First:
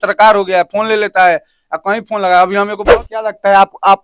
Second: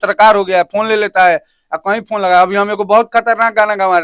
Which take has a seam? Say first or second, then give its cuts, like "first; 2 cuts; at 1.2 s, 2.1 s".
first; 1 cut; at 2.8 s